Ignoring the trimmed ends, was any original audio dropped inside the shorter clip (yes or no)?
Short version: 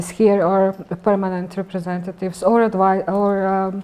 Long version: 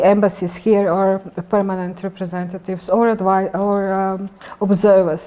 no